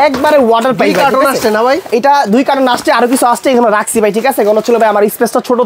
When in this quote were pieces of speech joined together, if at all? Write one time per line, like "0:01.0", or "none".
none